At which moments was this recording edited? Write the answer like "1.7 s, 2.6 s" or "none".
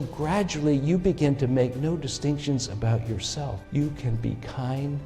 3.6 s